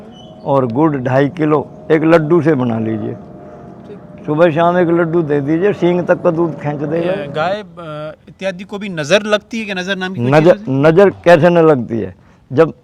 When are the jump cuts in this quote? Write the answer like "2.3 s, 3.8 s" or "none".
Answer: 7.3 s